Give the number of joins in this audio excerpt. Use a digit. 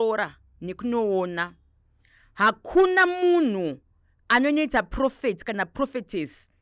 0